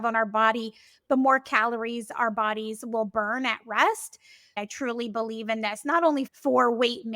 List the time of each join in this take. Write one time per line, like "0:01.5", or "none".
0:04.5
0:06.3